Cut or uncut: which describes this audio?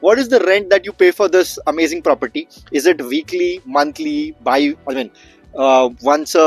uncut